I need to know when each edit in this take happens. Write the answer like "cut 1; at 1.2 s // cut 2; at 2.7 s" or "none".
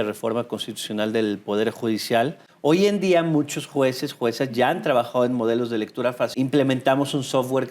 cut 1; at 2.4 s // cut 2; at 6.3 s